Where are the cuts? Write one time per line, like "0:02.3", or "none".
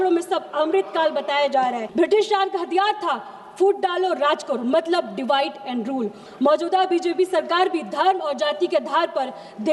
0:01.8
0:06.2